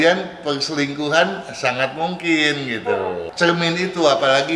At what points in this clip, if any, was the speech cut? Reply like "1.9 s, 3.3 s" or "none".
3.3 s

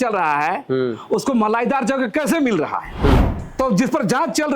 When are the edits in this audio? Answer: 3.4 s

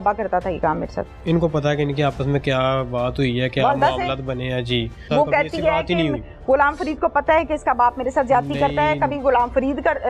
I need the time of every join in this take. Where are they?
1.2 s, 5.0 s

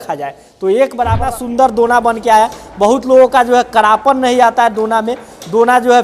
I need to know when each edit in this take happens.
1.2 s

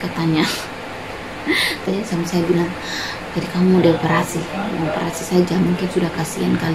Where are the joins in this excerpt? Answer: 2.0 s

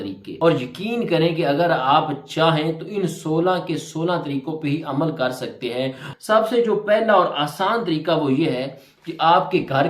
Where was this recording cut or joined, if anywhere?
6.1 s

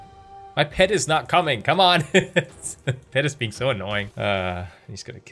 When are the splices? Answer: 4.1 s

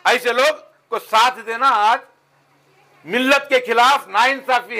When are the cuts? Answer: none

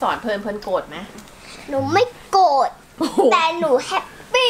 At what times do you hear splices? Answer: none

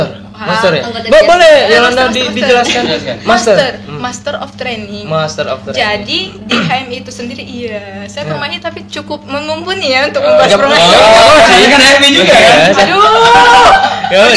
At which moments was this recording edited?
none

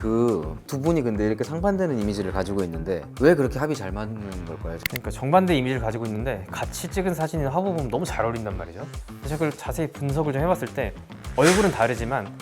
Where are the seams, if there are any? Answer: 3.1 s, 4.8 s

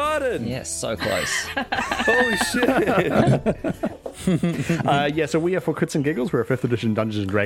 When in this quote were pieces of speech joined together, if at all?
4.1 s

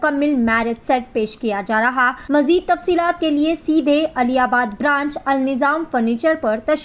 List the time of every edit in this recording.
2.2 s

